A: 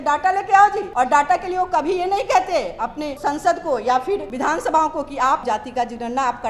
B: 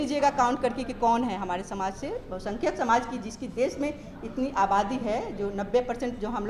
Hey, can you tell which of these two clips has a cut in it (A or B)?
A